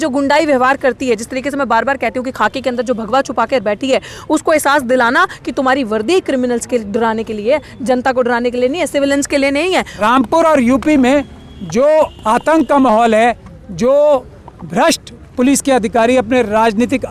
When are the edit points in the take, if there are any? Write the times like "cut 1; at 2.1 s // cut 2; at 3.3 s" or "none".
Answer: cut 1; at 9.9 s